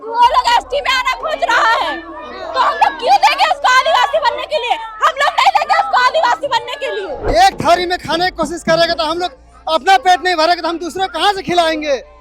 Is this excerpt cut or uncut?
cut